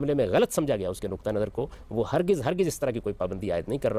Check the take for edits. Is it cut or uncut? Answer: uncut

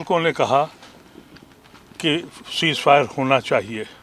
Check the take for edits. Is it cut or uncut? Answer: uncut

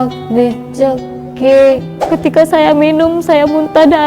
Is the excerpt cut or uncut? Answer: cut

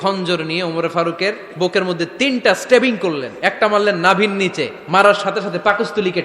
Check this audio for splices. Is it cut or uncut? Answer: cut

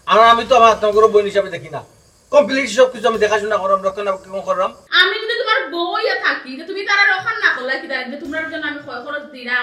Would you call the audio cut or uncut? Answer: cut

